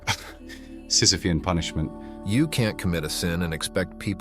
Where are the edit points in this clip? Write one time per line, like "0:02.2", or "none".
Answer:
0:02.1